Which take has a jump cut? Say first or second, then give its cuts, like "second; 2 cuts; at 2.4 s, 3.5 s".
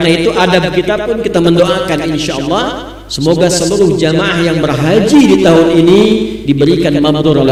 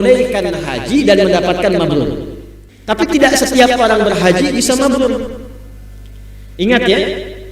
second; 1 cut; at 2.7 s